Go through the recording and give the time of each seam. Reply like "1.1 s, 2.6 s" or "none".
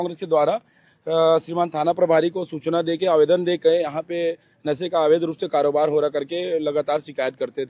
none

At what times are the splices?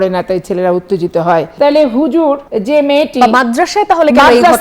1.5 s, 2.5 s

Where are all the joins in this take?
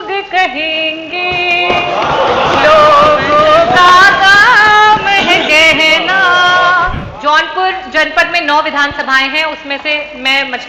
7.0 s

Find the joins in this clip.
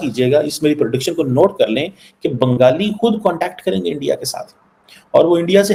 none

